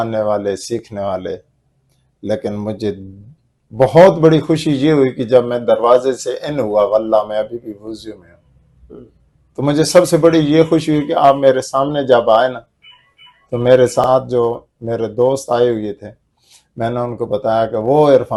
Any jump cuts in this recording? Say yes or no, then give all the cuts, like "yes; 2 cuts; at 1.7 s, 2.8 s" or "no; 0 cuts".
no; 0 cuts